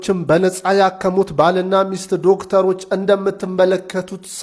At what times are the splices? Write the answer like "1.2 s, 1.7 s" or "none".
none